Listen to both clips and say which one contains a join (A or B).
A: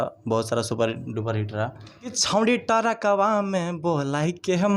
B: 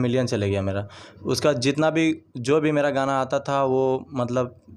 A